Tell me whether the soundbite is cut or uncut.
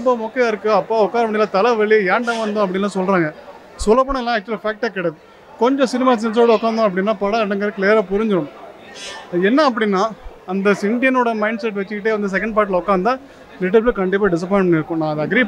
uncut